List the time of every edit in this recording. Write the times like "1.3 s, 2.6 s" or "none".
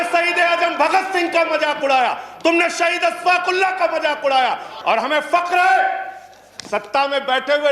4.7 s